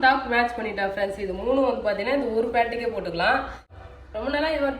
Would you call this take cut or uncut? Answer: cut